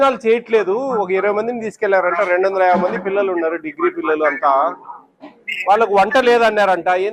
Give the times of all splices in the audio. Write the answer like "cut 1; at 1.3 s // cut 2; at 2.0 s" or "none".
none